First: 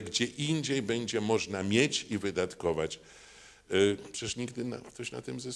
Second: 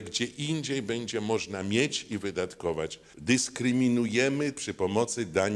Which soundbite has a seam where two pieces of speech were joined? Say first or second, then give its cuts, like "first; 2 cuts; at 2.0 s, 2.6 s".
second; 1 cut; at 3.0 s